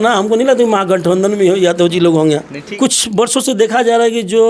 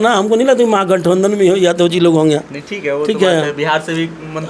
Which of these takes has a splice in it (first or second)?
first